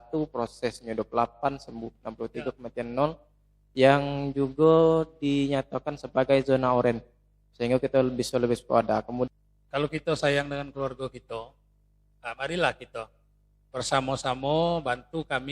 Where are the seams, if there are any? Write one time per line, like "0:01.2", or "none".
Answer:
0:09.3